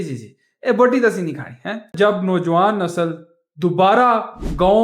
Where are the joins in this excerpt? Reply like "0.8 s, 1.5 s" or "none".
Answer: 1.9 s